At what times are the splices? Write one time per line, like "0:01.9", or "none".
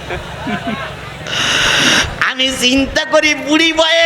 none